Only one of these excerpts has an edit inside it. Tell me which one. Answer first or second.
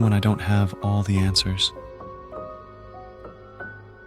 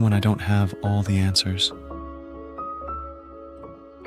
first